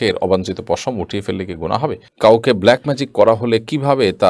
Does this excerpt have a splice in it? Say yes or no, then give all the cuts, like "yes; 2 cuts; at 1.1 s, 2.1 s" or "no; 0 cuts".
yes; 1 cut; at 2.1 s